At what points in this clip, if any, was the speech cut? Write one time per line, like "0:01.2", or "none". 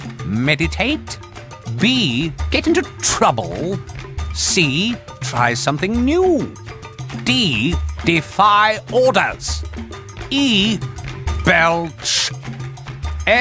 none

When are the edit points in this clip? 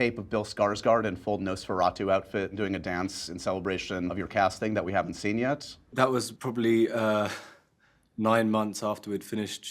0:02.5
0:04.1
0:05.8

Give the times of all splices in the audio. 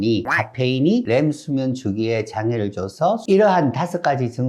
0:01.1
0:03.2

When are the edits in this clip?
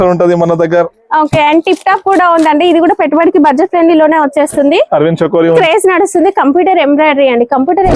0:05.6

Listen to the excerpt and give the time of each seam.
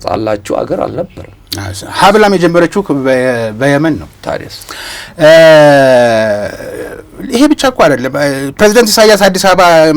none

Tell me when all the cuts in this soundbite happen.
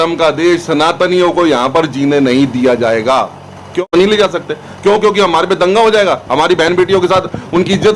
0:03.8

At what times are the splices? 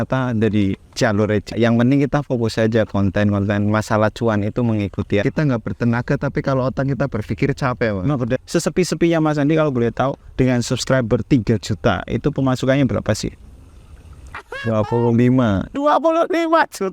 0:01.5
0:05.2
0:08.4

